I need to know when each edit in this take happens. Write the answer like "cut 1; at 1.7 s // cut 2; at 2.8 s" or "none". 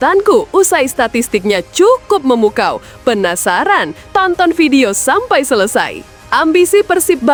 none